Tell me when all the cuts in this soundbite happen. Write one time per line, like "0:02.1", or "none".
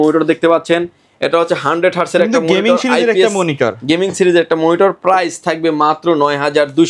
none